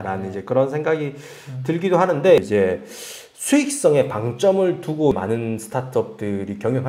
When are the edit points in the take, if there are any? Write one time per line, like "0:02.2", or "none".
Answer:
0:02.4